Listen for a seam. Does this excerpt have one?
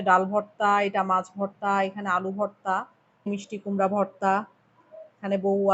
yes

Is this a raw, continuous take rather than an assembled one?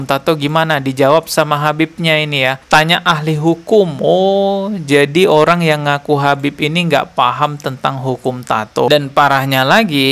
no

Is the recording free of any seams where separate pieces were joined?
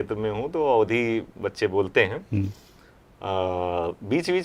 yes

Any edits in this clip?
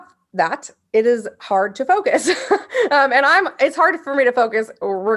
no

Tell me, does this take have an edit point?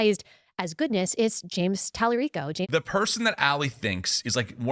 yes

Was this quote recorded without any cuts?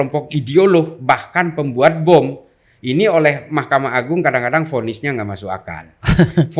yes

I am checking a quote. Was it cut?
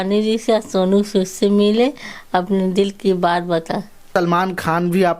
yes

